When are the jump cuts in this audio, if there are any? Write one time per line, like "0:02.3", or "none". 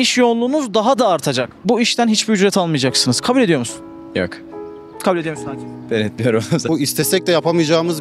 0:01.5
0:06.6

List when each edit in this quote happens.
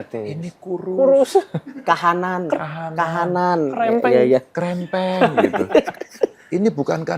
none

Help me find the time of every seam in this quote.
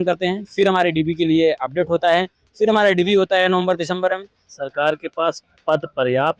0:04.4

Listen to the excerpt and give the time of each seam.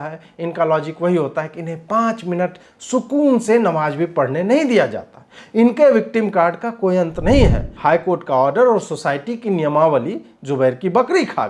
0:07.7

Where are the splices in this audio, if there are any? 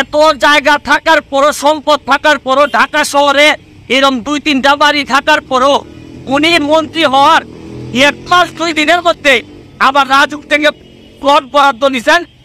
none

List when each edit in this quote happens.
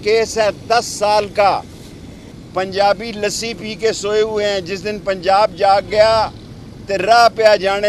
0:02.4

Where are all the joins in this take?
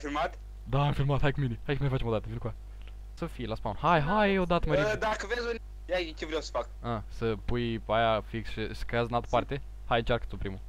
0:03.2
0:05.6

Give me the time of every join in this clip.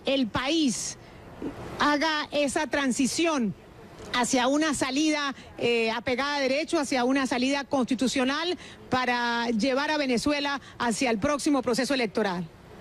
none

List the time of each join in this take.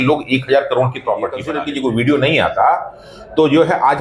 0:01.6

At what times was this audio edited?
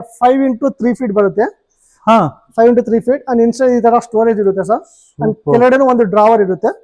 none

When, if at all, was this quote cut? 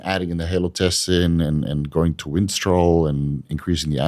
none

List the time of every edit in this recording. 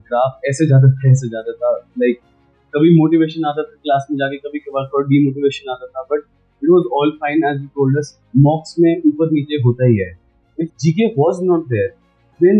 0:10.4

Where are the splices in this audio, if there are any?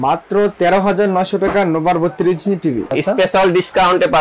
0:02.9

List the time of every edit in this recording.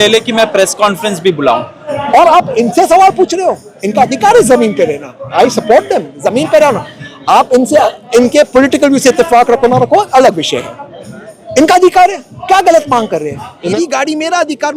0:01.8
0:13.7

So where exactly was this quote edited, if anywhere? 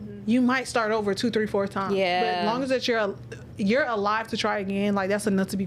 none

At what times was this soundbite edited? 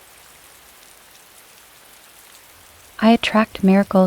0:03.0

